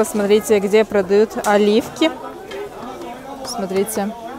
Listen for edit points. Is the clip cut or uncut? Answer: uncut